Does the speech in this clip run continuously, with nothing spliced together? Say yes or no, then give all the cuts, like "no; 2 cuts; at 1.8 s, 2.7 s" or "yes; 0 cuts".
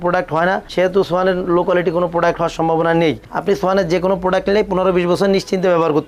yes; 0 cuts